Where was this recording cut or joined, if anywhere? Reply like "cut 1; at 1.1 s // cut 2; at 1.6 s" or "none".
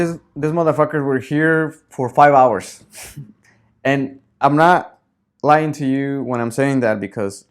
cut 1; at 1.8 s